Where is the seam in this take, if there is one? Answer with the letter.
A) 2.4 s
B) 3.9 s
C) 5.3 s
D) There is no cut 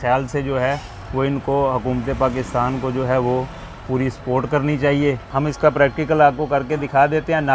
C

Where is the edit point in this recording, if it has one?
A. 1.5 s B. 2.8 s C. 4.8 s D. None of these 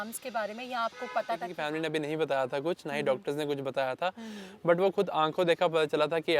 A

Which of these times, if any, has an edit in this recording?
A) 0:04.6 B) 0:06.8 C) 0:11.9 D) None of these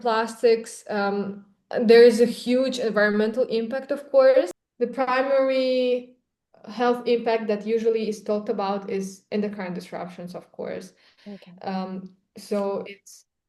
A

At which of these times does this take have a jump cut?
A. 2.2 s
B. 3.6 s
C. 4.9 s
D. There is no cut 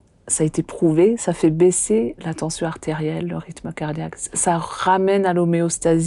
A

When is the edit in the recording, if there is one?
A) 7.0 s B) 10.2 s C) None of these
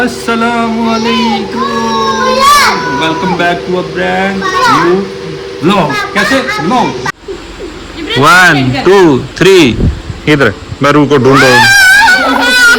A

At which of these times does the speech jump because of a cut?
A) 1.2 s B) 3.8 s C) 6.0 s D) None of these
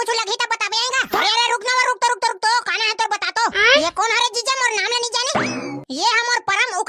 A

